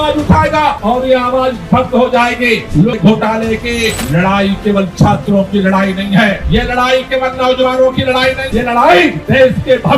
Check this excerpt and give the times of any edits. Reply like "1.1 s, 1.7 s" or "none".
2.9 s, 8.5 s